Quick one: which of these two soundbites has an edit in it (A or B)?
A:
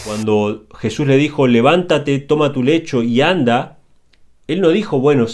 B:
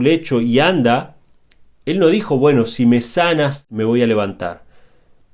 B